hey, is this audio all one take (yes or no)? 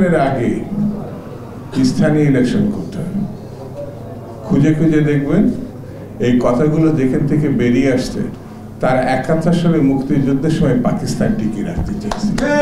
yes